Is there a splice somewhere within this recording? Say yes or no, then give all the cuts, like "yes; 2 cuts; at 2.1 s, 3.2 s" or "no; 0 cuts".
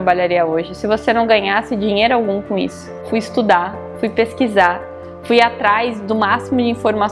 yes; 1 cut; at 3.0 s